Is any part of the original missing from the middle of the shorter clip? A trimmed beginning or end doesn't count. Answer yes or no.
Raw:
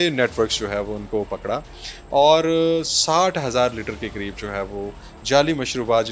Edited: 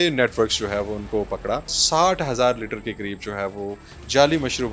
yes